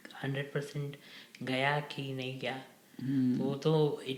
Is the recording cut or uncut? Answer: uncut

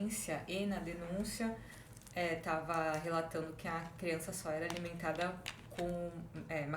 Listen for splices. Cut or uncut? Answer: uncut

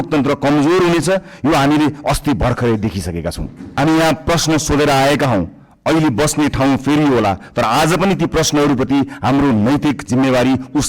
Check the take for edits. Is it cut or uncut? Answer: cut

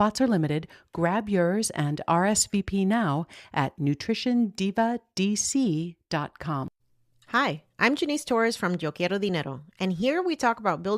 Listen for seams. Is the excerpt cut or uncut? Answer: cut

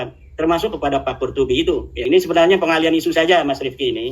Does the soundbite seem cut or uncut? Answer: cut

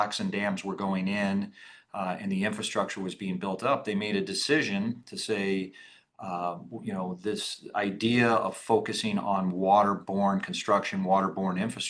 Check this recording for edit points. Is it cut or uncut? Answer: uncut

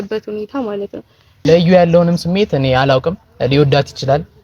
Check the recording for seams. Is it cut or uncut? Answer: cut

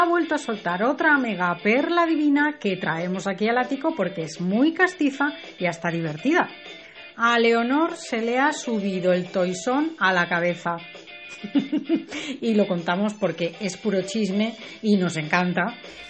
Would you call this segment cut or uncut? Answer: uncut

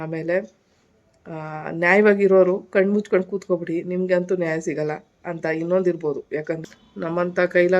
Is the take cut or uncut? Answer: cut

